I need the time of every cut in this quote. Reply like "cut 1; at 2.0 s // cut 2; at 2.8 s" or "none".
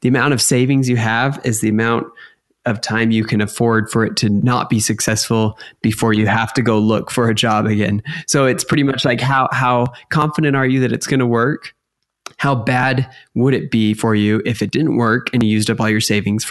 cut 1; at 4.4 s